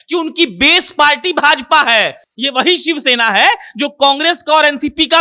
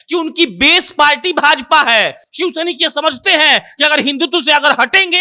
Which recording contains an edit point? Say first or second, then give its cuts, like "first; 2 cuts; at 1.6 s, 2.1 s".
first; 1 cut; at 2.2 s